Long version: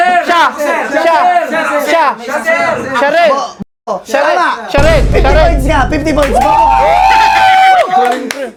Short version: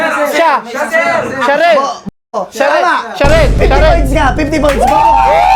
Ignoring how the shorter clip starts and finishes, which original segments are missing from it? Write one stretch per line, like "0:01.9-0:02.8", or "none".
none